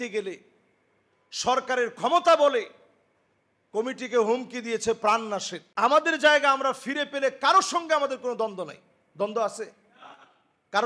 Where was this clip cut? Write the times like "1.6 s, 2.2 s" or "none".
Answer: 5.6 s